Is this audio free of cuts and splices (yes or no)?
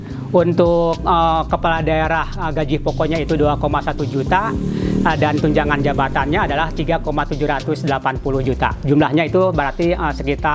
yes